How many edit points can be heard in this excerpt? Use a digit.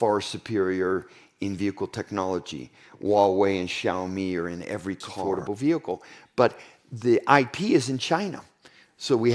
1